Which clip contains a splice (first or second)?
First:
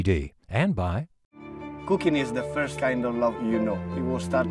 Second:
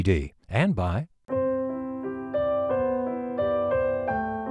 second